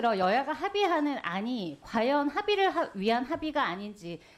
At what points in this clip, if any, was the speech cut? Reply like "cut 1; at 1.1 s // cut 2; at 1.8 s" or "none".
none